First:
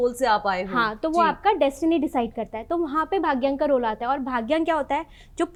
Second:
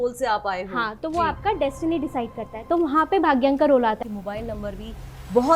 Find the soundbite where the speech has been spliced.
second; 1 cut; at 4.0 s

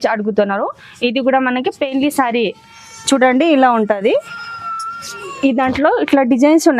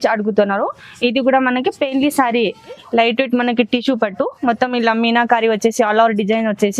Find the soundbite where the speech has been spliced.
second; 1 cut; at 2.8 s

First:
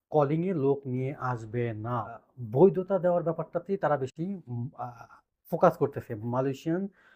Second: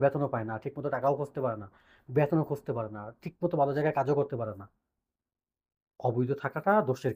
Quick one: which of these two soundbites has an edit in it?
first; 1 cut; at 2.1 s

